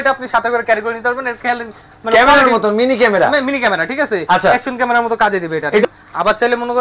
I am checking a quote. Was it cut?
yes; 1 cut; at 5.8 s

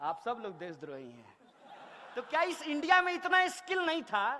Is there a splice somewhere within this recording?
yes; 1 cut; at 2.0 s

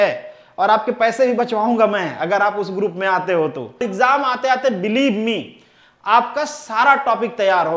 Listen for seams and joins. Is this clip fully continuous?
no; 1 cut; at 3.9 s

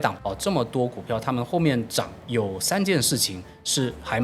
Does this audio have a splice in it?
yes; 1 cut; at 2.2 s

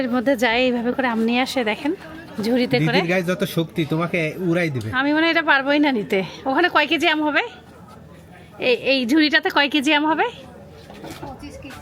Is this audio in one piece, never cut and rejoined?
yes; 0 cuts

